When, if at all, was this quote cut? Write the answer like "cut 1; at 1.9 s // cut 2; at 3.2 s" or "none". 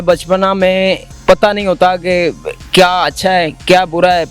cut 1; at 1.1 s